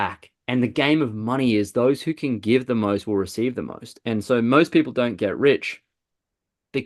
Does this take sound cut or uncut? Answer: uncut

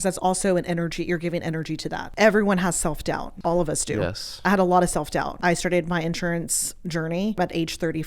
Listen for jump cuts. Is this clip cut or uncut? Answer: cut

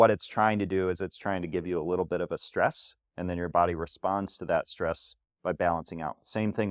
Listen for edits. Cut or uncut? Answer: uncut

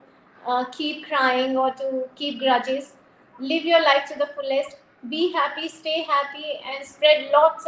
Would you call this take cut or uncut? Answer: uncut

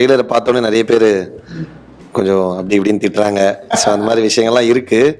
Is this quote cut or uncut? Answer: uncut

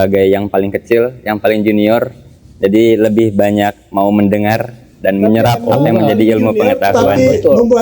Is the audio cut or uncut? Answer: uncut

